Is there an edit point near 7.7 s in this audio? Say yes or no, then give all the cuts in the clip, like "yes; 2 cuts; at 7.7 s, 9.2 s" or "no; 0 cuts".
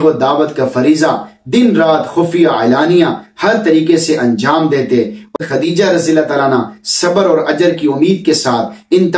no; 1 cut; at 5.4 s